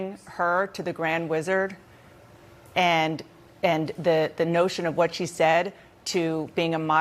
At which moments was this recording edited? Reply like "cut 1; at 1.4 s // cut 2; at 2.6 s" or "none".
cut 1; at 4.5 s

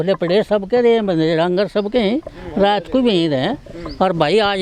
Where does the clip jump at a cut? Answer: none

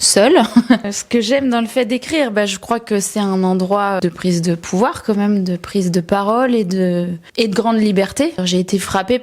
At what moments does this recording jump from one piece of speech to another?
cut 1; at 0.9 s // cut 2; at 4.0 s // cut 3; at 7.2 s // cut 4; at 8.4 s

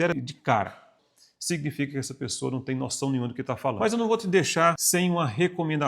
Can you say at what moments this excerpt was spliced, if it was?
cut 1; at 0.9 s // cut 2; at 3.8 s // cut 3; at 4.8 s

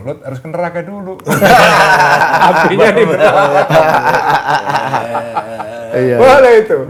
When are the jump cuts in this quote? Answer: none

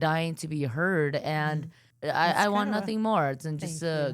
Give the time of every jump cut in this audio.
cut 1; at 1.8 s

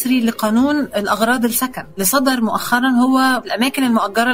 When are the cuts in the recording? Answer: cut 1; at 2.0 s // cut 2; at 3.4 s

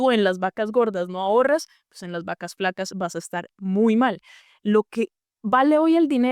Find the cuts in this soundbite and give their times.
cut 1; at 4.3 s

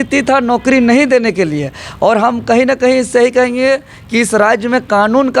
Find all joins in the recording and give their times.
none

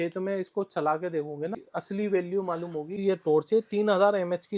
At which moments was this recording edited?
cut 1; at 1.7 s // cut 2; at 3.0 s

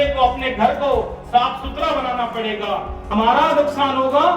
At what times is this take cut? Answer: cut 1; at 3.1 s

